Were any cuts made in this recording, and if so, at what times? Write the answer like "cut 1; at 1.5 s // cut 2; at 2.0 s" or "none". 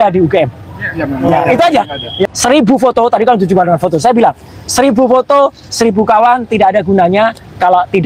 cut 1; at 2.3 s